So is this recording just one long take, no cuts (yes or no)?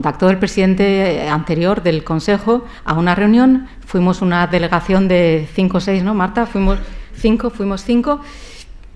no